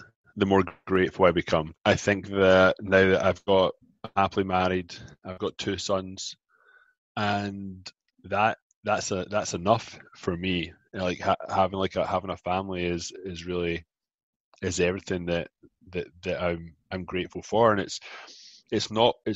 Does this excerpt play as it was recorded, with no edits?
no; 1 cut; at 1.7 s

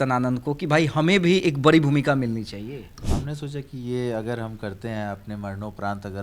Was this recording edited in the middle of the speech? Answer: yes; 1 cut; at 3.0 s

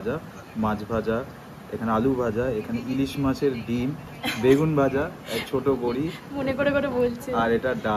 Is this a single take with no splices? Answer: yes; 0 cuts

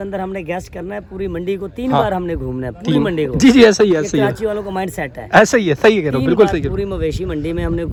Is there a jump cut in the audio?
no; 0 cuts

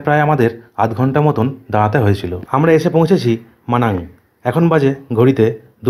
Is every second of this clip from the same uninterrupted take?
no; 1 cut; at 2.4 s

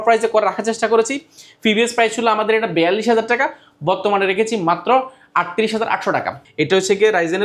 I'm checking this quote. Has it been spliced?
yes; 1 cut; at 6.4 s

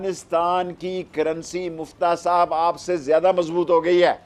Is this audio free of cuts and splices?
yes; 0 cuts

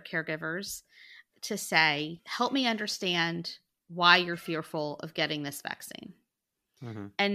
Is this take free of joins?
yes; 0 cuts

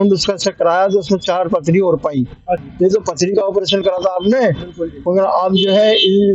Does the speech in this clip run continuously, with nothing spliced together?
no; 1 cut; at 2.7 s

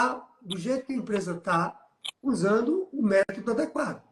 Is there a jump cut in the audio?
no; 0 cuts

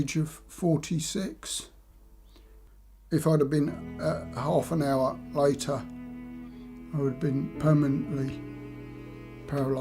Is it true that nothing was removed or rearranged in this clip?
no; 1 cut; at 2.8 s

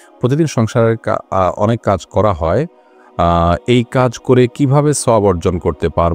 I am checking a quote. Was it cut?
no; 0 cuts

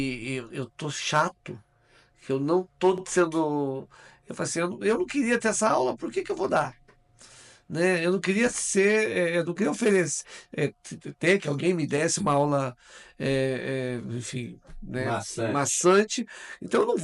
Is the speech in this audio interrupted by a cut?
no; 0 cuts

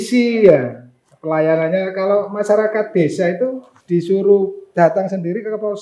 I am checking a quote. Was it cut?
yes; 2 cuts; at 3.7 s, 4.6 s

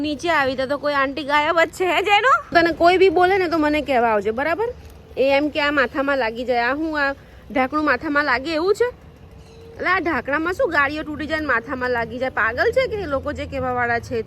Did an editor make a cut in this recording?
yes; 1 cut; at 2.4 s

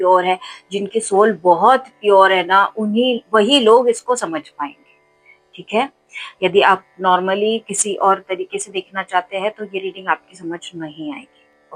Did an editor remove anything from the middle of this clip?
no; 0 cuts

